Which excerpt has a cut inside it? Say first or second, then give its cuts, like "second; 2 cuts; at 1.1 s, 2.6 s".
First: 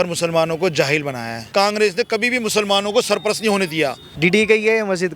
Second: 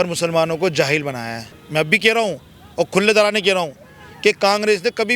first; 2 cuts; at 1.5 s, 4.1 s